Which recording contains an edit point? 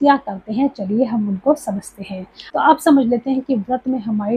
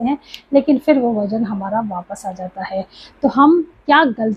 first; 1 cut; at 2.5 s

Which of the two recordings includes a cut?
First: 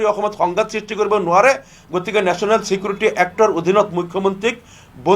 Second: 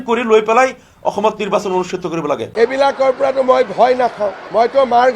second; 1 cut; at 2.5 s

